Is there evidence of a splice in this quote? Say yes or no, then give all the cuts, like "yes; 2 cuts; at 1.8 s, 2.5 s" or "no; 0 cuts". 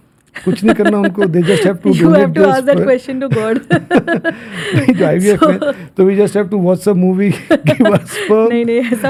no; 0 cuts